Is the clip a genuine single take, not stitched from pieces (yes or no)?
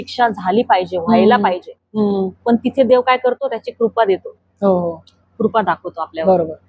yes